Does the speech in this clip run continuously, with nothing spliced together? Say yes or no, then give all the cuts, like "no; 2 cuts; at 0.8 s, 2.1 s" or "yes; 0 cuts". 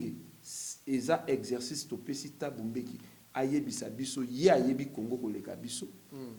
yes; 0 cuts